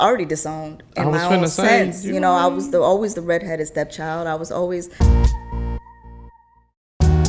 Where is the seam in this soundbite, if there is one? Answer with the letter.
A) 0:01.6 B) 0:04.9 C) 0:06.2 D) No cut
B